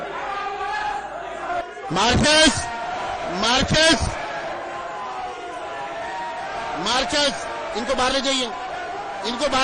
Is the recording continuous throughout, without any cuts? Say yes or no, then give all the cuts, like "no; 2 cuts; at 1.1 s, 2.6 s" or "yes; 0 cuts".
no; 1 cut; at 1.6 s